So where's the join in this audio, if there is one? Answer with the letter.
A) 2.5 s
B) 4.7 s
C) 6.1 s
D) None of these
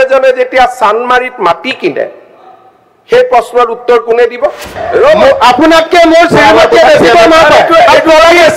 B